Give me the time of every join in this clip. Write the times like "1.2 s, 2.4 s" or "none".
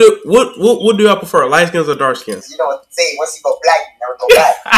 2.3 s